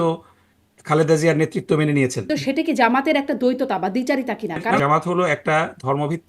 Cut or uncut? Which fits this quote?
cut